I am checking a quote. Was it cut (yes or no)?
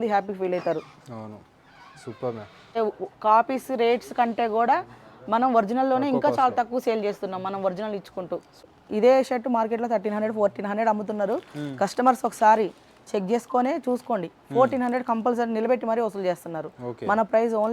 yes